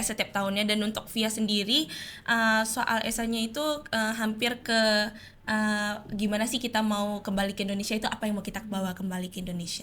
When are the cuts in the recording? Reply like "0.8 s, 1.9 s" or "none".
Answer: none

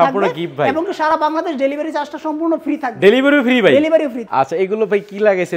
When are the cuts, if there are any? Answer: 4.2 s

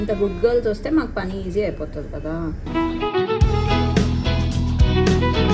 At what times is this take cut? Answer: 2.6 s

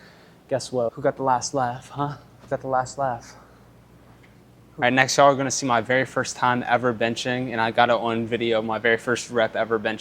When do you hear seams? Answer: 0.9 s, 2.5 s, 4.7 s

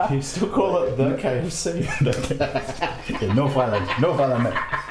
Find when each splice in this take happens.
none

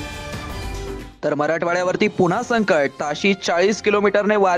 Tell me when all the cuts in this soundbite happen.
1.0 s

